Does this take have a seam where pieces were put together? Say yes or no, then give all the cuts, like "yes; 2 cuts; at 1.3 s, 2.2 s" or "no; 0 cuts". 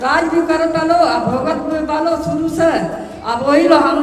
no; 0 cuts